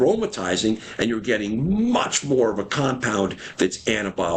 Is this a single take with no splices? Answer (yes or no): yes